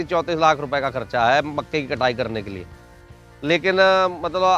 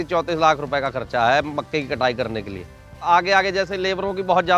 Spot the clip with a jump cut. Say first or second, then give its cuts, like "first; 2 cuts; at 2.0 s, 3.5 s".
second; 1 cut; at 3.1 s